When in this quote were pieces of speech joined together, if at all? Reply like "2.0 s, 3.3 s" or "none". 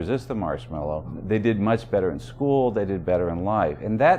1.2 s